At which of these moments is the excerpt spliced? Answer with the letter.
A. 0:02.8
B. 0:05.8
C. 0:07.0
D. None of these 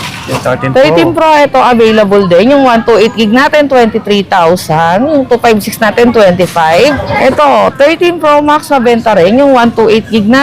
C